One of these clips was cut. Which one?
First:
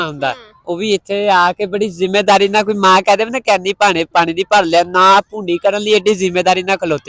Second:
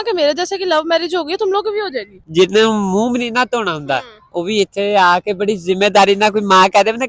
second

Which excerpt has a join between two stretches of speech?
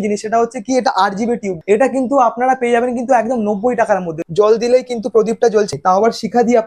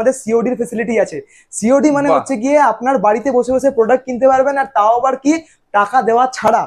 first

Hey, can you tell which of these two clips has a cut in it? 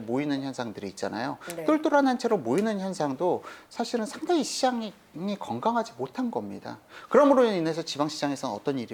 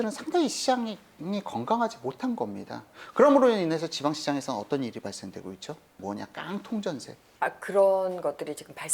second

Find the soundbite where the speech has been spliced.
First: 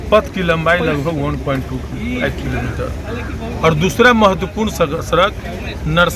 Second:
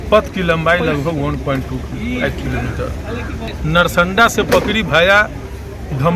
second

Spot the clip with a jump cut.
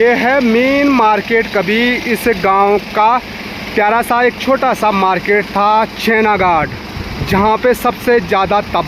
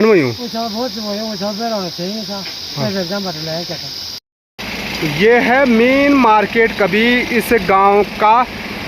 second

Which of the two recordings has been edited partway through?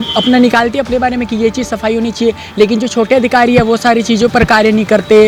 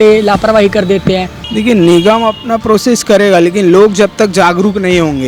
second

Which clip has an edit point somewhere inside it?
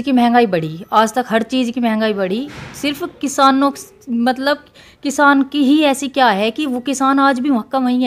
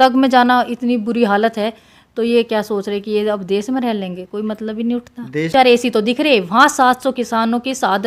second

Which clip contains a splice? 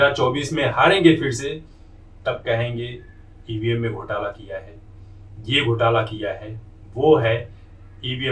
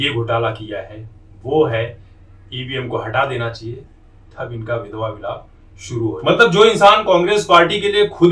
second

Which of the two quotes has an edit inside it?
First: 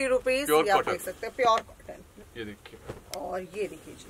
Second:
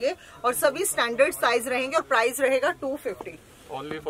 first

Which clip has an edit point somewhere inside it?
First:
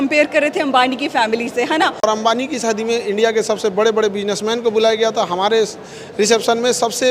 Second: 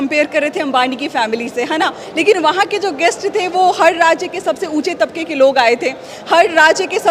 first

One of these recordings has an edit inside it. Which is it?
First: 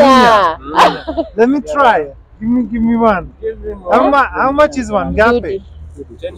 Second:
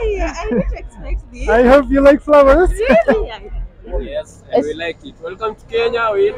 second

